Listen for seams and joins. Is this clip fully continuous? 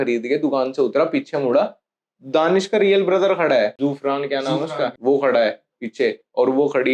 no; 2 cuts; at 3.7 s, 5.0 s

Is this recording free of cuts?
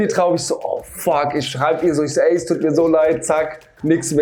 yes; 0 cuts

